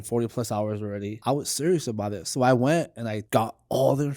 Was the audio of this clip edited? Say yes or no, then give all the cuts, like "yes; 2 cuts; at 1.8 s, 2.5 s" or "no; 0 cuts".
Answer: yes; 2 cuts; at 1.2 s, 3.2 s